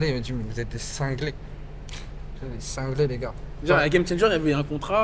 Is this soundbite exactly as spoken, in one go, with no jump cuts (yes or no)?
yes